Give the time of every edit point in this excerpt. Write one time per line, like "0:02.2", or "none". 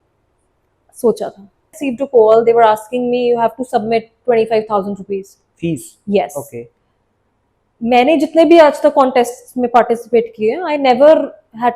0:01.8